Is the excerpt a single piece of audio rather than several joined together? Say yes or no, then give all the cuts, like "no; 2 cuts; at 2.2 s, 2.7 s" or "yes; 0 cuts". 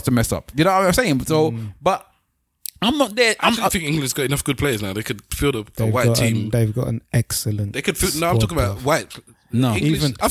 yes; 0 cuts